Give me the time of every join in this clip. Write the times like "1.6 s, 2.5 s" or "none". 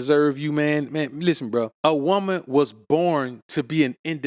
1.7 s